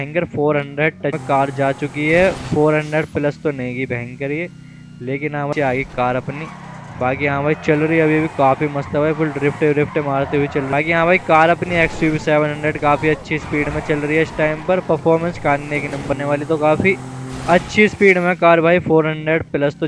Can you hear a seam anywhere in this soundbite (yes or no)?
yes